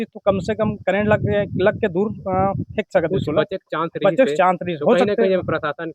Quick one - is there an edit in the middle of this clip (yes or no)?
no